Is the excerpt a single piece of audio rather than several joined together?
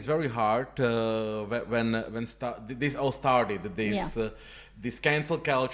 yes; 0 cuts

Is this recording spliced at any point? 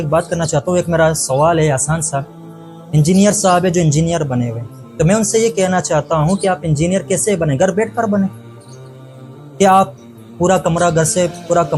no; 0 cuts

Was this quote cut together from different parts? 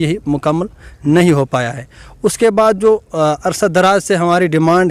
no; 0 cuts

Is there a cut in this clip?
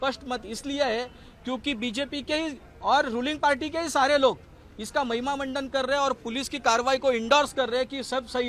no; 0 cuts

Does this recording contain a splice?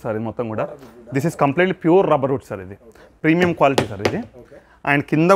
no; 0 cuts

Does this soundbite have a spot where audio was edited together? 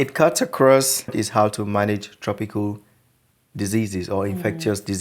yes; 1 cut; at 1.2 s

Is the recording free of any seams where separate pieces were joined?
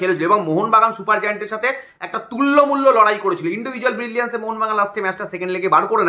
yes; 0 cuts

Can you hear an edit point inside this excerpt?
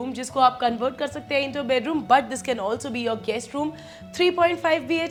no; 0 cuts

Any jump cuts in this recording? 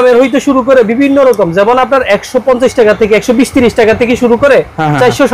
no; 0 cuts

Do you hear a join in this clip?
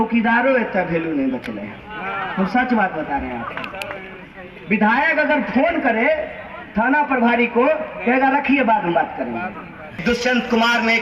yes; 1 cut; at 9.9 s

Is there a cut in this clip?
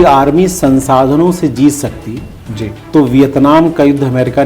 no; 0 cuts

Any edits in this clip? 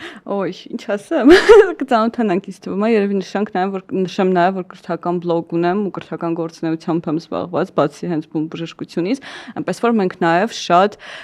no; 0 cuts

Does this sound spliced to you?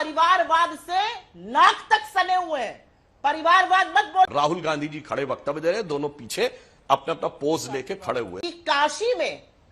yes; 2 cuts; at 4.3 s, 8.4 s

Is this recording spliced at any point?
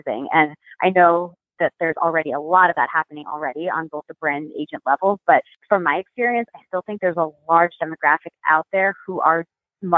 no; 0 cuts

